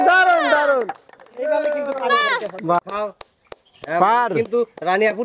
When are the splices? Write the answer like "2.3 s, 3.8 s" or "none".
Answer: 2.8 s